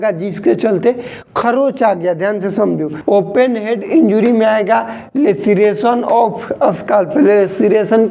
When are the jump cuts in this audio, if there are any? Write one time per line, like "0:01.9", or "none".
0:02.9